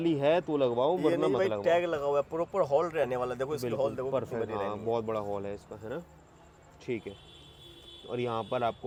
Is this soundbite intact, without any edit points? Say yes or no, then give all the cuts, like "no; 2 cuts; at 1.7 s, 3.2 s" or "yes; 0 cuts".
yes; 0 cuts